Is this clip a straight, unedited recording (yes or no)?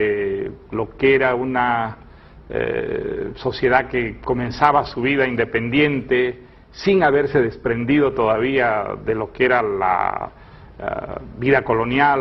yes